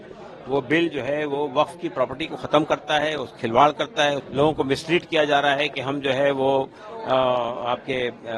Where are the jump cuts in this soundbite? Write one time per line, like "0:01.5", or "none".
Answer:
0:04.2